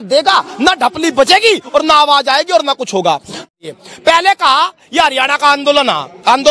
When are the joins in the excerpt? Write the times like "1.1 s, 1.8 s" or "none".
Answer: 3.4 s